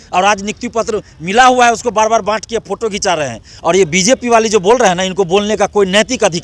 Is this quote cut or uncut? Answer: cut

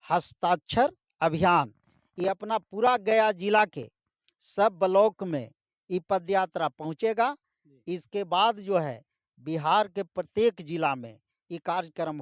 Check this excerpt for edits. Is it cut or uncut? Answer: uncut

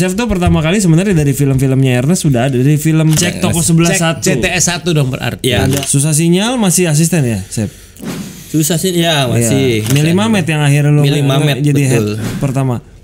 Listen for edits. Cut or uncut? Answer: cut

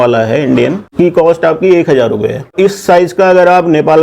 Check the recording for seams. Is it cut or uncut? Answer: cut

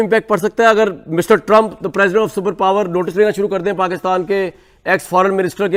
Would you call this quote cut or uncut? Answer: uncut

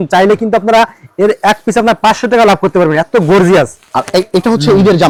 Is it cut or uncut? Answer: uncut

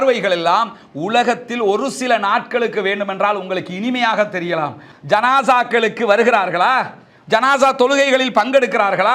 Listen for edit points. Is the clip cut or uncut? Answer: cut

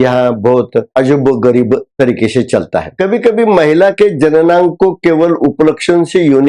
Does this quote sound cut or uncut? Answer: cut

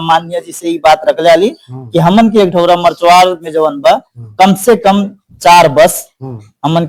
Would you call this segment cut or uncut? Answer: uncut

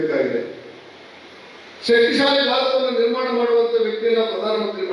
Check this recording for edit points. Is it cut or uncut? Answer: uncut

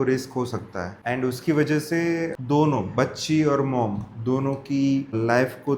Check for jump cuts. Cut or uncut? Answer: uncut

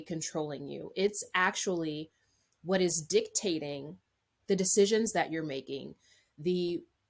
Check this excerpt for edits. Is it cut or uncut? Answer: uncut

